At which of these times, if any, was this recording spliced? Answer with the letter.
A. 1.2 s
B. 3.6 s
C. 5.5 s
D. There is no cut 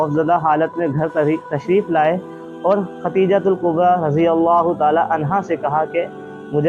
D